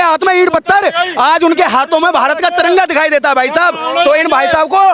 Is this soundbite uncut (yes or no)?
yes